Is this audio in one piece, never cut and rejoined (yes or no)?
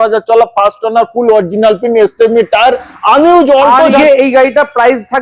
no